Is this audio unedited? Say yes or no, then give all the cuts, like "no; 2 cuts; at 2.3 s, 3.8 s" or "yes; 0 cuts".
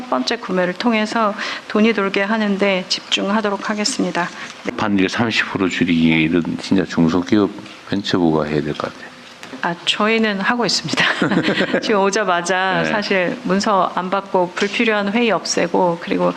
no; 1 cut; at 4.7 s